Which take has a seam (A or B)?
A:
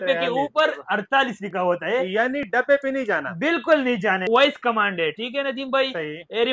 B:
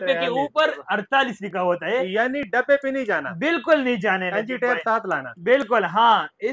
A